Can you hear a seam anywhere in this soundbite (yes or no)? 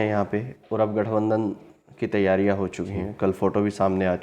no